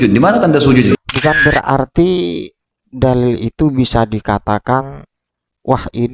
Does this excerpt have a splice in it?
yes; 1 cut; at 1.1 s

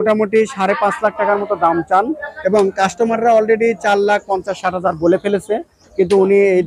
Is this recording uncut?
yes; 0 cuts

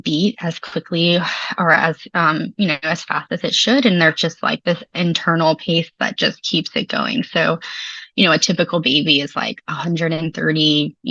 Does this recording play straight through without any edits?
yes; 0 cuts

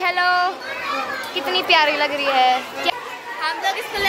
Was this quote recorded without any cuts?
no; 1 cut; at 2.9 s

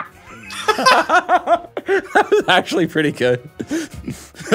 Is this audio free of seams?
yes; 0 cuts

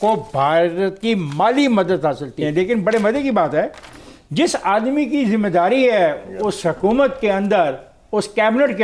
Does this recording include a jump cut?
yes; 1 cut; at 2.4 s

